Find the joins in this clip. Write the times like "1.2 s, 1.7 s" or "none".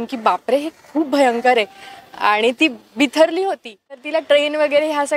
4.1 s